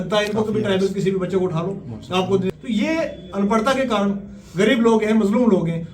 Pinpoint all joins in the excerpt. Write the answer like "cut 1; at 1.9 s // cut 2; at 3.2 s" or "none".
cut 1; at 2.5 s